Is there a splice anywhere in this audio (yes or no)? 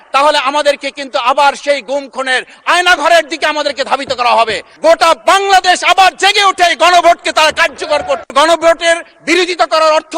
yes